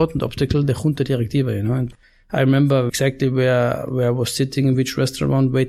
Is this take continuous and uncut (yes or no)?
no